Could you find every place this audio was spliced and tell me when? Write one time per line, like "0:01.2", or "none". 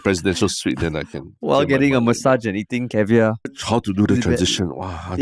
0:03.5